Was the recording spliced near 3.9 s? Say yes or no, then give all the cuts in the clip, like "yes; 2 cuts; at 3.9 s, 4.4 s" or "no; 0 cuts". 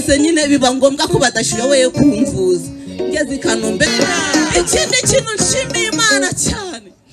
yes; 1 cut; at 3.9 s